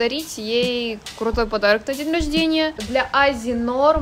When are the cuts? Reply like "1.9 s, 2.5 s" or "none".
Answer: 2.7 s